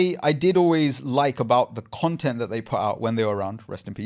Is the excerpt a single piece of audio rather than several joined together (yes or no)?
yes